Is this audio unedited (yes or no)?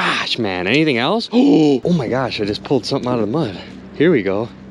no